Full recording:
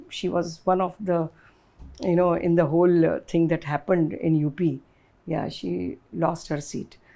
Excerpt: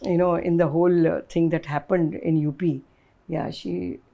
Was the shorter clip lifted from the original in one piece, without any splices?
yes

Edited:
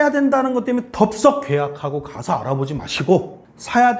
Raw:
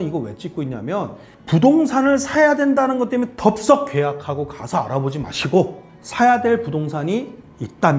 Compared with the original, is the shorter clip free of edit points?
yes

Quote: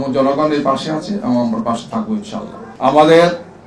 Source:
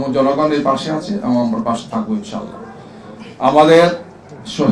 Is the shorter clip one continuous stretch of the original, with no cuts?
no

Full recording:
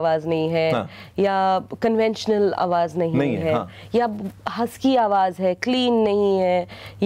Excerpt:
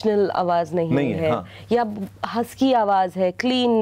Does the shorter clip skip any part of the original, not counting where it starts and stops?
no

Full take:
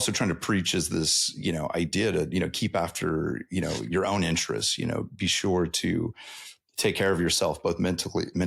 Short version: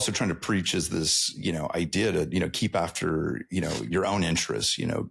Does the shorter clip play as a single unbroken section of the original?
yes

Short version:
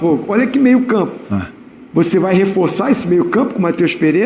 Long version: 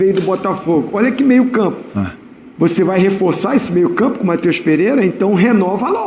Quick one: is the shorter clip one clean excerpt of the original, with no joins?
yes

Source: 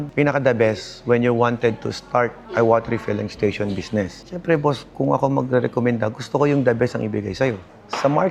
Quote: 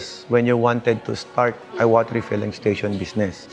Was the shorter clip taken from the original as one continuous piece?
yes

